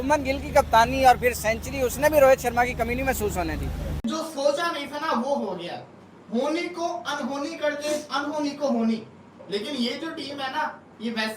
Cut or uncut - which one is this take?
cut